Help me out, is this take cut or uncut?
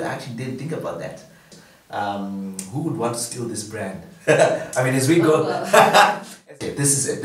cut